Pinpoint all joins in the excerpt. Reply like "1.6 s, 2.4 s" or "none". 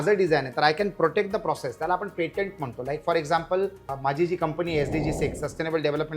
3.9 s